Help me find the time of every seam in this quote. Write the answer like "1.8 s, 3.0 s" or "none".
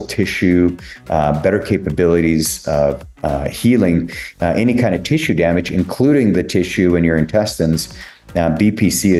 none